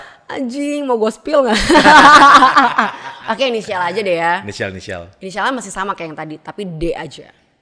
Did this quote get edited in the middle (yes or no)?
no